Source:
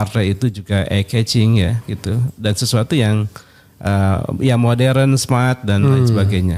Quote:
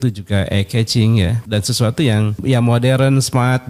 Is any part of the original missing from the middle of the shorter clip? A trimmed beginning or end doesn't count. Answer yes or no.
yes